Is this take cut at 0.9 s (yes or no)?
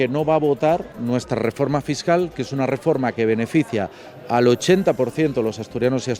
yes